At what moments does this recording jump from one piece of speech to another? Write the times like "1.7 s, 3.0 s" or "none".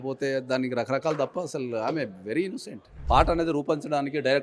2.9 s